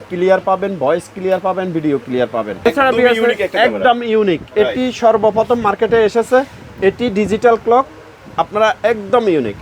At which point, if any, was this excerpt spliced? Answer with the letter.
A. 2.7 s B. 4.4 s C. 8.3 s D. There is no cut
A